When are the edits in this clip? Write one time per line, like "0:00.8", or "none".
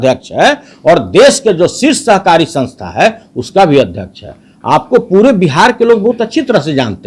none

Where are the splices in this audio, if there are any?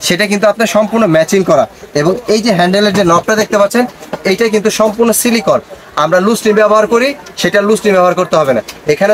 none

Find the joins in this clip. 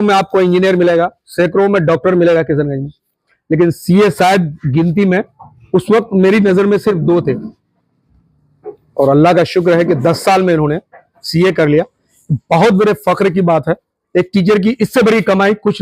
none

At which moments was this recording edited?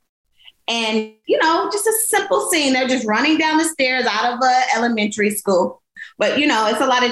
0:01.2
0:06.0

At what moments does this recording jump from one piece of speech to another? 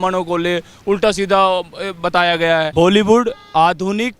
0:02.7

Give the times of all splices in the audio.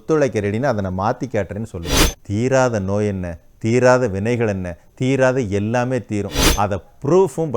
0:01.9
0:06.4

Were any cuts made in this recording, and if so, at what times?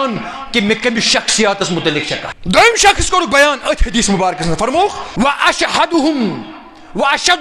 0:02.3
0:05.0

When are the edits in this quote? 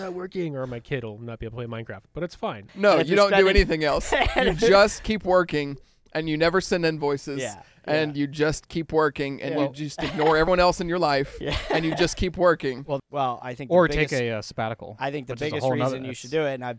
0:02.7
0:13.0

